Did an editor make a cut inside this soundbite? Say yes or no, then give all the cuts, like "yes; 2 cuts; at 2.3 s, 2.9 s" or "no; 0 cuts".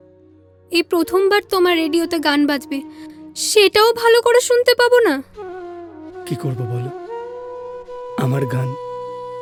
no; 0 cuts